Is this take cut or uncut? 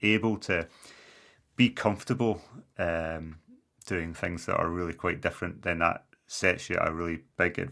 uncut